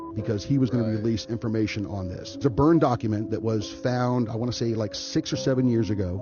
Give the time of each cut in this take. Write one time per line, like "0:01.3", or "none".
none